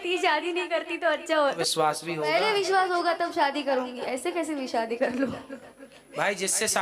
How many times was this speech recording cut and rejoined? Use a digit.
1